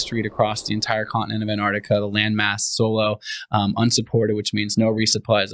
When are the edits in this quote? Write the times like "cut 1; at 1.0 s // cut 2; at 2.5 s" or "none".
none